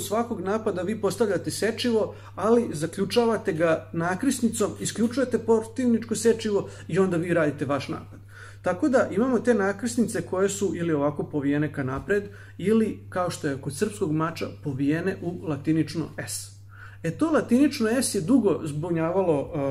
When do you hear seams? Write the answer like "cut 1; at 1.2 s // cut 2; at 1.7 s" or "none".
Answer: none